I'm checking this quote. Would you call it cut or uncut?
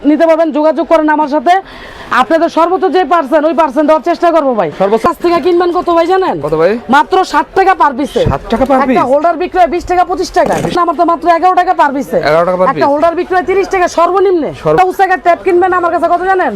cut